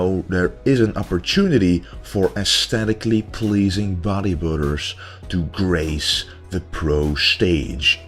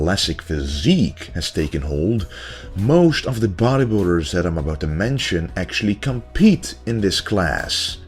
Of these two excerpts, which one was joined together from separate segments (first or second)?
second